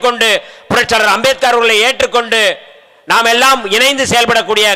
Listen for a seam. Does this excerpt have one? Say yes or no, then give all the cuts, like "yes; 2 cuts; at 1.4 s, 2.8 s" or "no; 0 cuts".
no; 0 cuts